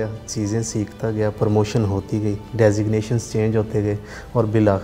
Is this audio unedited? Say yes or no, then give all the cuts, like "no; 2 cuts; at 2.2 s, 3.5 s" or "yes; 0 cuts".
yes; 0 cuts